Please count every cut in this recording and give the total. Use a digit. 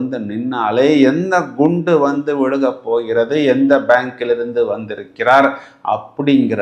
0